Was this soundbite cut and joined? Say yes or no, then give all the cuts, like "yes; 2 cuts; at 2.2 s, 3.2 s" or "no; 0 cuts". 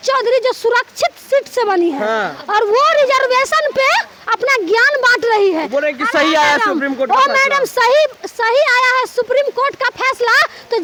no; 0 cuts